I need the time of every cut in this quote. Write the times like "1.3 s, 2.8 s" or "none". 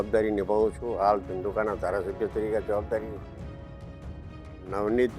none